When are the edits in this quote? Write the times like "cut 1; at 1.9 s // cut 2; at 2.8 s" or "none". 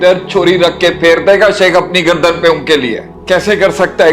cut 1; at 3.1 s